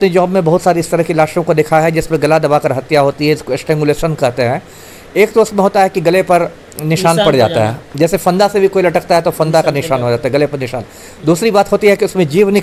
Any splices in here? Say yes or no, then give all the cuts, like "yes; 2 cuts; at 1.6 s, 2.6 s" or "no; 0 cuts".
no; 0 cuts